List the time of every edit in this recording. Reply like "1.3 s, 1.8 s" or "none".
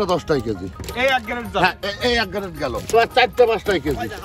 2.9 s